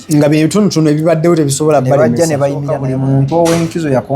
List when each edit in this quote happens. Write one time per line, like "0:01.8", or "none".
0:02.8